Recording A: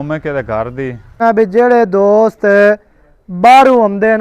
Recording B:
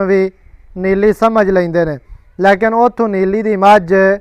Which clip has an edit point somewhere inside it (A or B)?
A